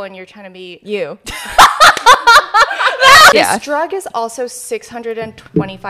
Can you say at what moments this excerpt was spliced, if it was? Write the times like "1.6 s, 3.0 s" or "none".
3.3 s